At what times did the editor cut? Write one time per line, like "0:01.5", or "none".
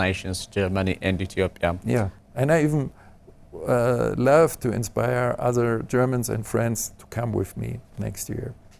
0:02.2